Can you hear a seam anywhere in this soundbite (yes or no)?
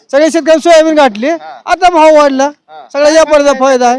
no